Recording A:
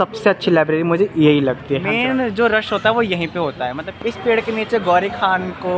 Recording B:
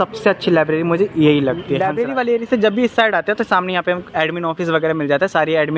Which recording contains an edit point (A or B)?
A